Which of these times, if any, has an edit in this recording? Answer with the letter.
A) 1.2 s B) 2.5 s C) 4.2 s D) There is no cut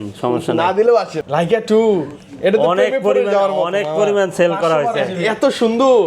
A